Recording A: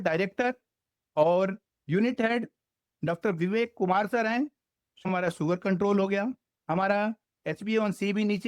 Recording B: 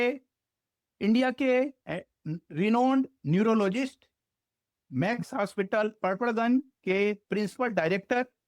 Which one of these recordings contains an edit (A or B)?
A